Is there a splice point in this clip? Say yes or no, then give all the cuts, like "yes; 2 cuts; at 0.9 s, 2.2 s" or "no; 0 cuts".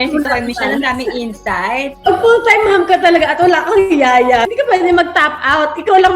yes; 2 cuts; at 1.9 s, 4.4 s